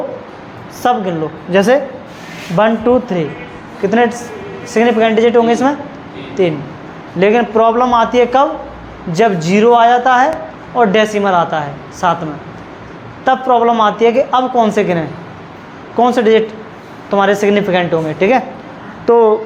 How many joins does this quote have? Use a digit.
0